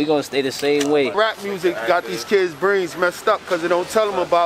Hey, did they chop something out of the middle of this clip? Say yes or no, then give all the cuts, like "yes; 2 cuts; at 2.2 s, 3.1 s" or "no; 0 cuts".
yes; 1 cut; at 1.1 s